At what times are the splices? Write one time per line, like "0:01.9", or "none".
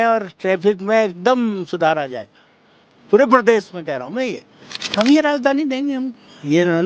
0:04.8